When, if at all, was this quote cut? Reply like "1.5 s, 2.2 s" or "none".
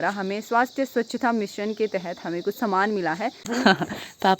3.5 s